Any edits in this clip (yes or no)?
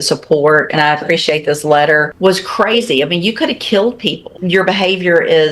yes